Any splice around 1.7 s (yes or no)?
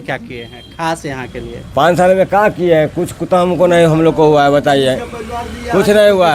no